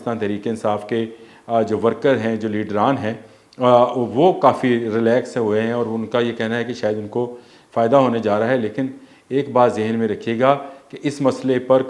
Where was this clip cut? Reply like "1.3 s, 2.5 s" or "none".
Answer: none